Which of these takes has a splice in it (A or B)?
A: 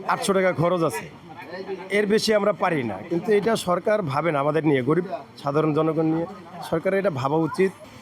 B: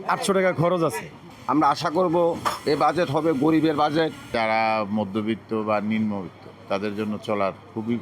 B